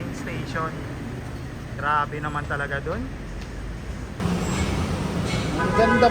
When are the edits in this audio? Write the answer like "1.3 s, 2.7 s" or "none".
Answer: 4.2 s